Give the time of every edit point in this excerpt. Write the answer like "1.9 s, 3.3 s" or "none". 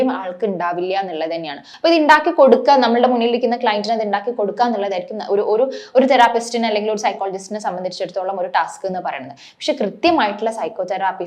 1.6 s